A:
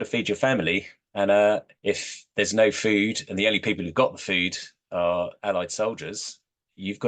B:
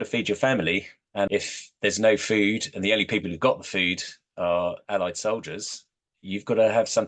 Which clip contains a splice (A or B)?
B